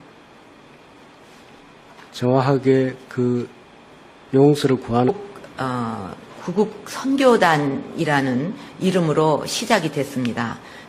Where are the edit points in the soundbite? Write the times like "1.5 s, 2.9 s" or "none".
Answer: none